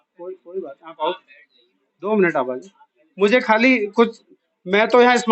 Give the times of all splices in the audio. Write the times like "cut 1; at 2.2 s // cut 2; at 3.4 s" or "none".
none